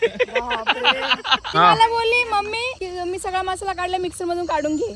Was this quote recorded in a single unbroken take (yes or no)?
no